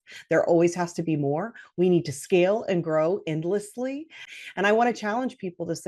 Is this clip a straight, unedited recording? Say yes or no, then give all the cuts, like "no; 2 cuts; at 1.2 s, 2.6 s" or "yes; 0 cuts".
no; 1 cut; at 4.3 s